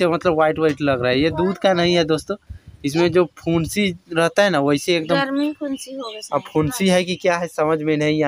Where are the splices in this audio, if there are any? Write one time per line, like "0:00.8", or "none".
none